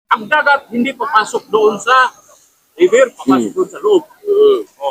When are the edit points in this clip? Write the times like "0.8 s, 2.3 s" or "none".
none